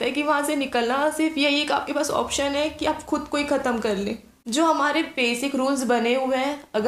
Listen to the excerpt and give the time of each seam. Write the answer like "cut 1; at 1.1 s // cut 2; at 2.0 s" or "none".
cut 1; at 4.3 s